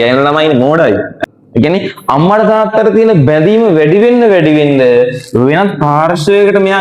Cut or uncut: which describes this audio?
cut